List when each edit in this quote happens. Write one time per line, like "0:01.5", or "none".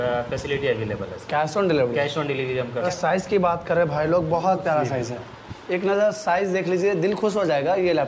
0:02.8